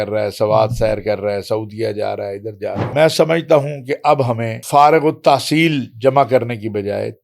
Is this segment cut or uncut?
cut